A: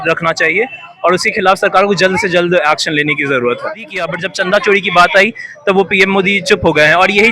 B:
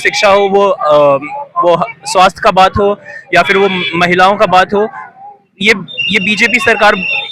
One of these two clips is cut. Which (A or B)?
A